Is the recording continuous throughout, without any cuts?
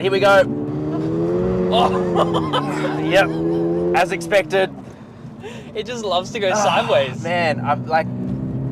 yes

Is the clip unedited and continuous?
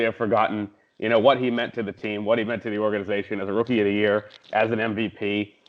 yes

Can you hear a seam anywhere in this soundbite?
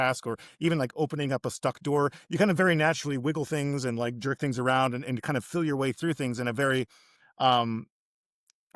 no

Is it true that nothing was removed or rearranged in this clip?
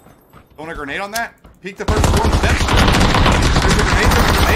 yes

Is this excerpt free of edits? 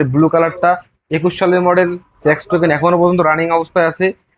yes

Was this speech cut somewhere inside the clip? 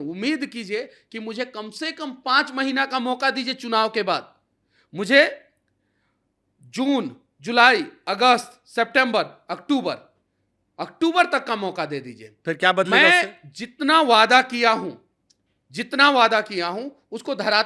no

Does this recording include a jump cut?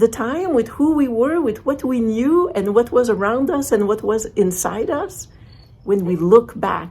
yes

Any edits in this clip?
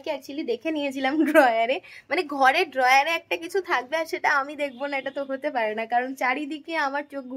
no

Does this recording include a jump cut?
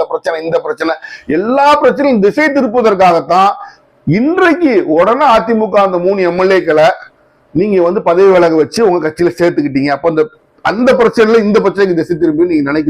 no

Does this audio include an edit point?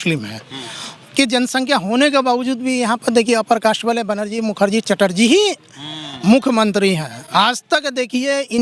no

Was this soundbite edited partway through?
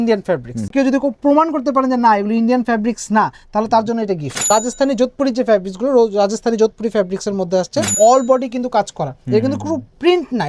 yes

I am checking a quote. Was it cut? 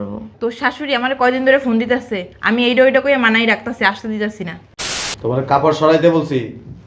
yes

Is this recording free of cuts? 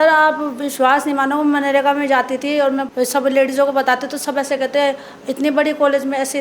no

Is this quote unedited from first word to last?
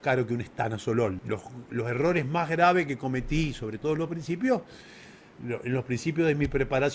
no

